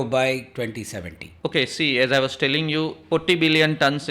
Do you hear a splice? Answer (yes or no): yes